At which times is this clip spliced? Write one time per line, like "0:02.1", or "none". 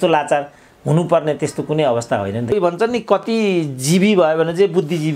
0:02.5